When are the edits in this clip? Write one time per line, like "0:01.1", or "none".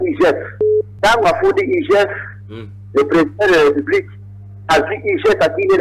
0:00.9